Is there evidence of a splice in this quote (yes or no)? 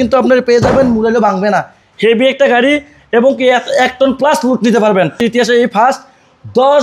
yes